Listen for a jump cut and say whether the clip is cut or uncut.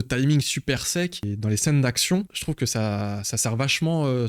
cut